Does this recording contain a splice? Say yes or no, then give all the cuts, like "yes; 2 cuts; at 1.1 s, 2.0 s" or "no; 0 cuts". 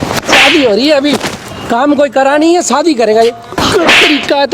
yes; 1 cut; at 3.5 s